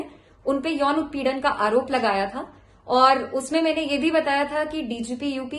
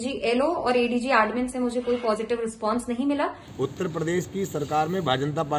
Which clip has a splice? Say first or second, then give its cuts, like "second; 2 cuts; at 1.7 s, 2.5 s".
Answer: second; 1 cut; at 3.4 s